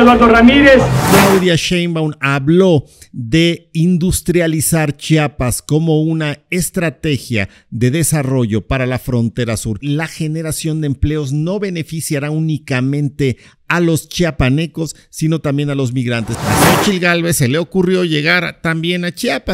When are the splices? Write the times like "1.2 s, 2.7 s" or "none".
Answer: 1.0 s, 9.8 s, 16.3 s